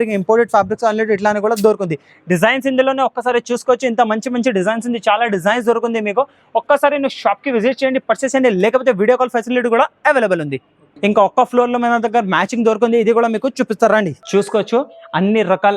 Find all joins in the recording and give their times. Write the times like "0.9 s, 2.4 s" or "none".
none